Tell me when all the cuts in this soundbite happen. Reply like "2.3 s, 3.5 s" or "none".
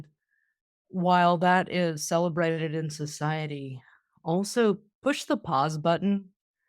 4.9 s